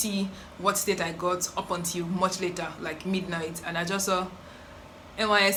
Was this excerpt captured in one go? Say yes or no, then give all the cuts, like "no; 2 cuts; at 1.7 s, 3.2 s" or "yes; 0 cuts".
yes; 0 cuts